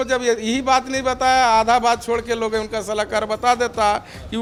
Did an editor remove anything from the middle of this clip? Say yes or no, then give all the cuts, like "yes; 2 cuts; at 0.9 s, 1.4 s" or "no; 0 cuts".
no; 0 cuts